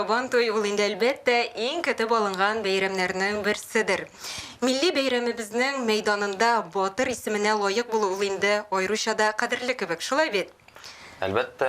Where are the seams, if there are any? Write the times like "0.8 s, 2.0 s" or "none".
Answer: none